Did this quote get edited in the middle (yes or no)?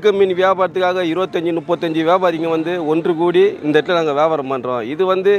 no